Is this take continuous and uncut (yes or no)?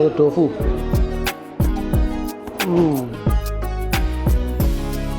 yes